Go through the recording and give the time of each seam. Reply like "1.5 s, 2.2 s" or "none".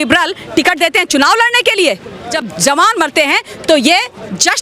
2.3 s